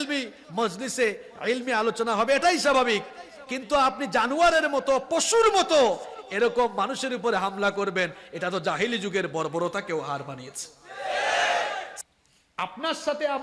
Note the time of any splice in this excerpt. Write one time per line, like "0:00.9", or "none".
0:11.9